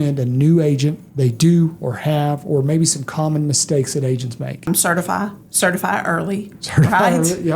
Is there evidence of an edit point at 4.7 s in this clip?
yes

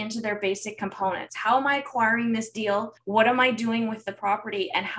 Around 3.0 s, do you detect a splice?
yes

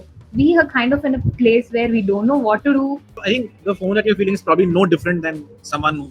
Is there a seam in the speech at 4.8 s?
no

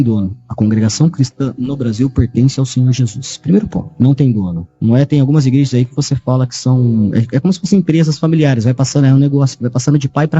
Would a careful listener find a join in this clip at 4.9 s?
yes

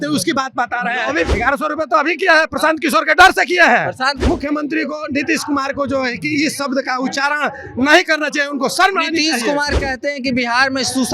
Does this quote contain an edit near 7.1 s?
no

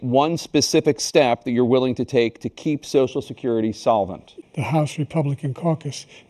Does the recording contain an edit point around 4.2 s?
yes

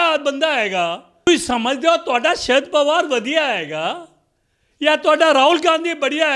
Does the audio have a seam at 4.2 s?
no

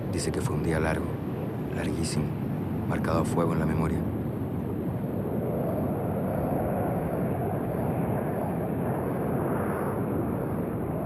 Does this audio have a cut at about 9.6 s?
no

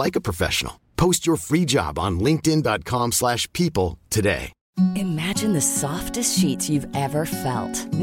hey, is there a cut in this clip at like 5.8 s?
no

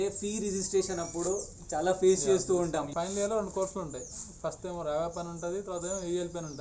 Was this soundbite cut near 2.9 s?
yes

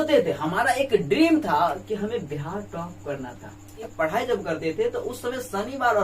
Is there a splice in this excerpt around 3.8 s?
yes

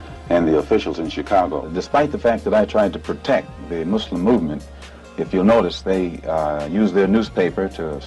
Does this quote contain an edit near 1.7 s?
yes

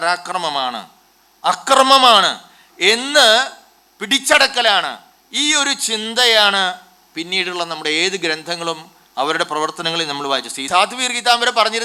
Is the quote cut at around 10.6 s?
yes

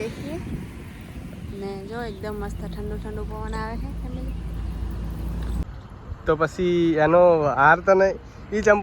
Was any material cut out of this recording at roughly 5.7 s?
yes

